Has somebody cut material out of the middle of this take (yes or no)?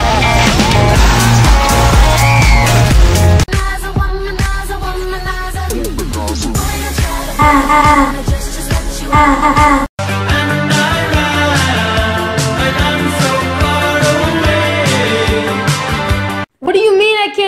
yes